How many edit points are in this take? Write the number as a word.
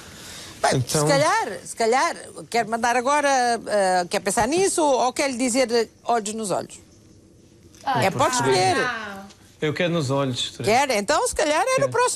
zero